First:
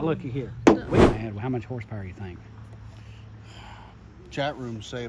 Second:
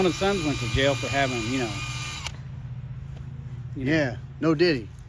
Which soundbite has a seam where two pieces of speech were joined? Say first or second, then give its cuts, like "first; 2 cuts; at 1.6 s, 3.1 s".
first; 1 cut; at 1.0 s